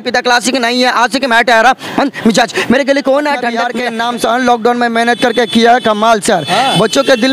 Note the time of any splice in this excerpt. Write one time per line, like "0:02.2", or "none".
0:03.7